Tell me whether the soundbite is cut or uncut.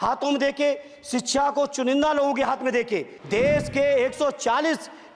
cut